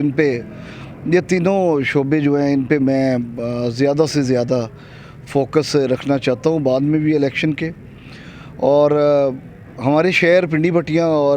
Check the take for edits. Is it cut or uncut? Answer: uncut